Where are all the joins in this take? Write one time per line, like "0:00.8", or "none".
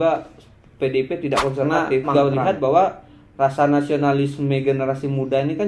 0:02.1